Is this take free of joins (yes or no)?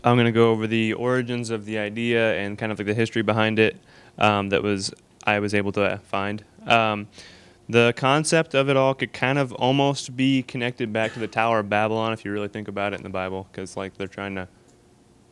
yes